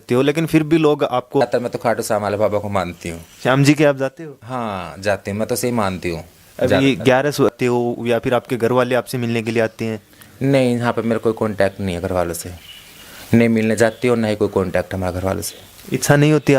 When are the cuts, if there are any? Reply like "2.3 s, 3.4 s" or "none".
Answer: 1.4 s, 7.5 s